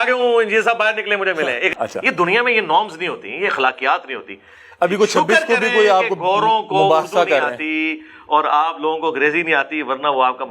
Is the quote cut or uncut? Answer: cut